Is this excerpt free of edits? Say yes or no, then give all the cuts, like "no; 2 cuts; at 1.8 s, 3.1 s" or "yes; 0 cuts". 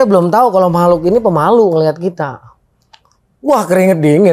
yes; 0 cuts